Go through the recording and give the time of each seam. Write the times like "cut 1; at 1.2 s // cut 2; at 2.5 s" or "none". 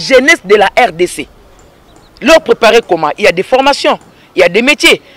none